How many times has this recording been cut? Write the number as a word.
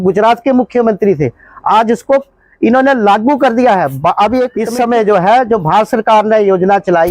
one